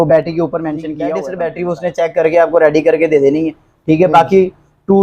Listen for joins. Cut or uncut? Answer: cut